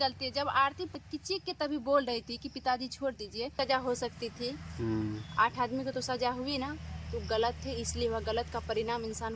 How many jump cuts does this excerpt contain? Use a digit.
2